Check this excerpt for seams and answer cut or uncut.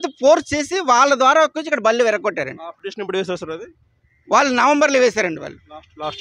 uncut